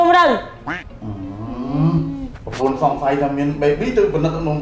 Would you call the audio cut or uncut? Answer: uncut